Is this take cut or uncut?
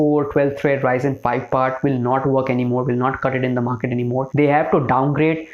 cut